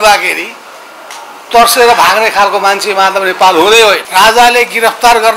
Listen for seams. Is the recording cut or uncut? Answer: cut